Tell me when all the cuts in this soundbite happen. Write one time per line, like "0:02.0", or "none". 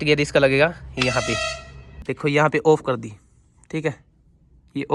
0:02.0